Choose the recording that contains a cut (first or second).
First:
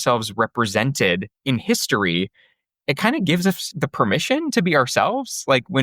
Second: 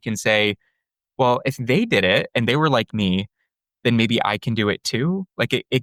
first